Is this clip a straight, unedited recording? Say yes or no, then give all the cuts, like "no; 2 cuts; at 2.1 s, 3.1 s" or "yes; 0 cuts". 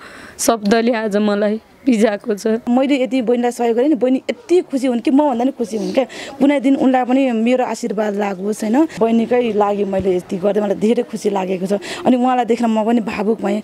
no; 2 cuts; at 2.7 s, 8.9 s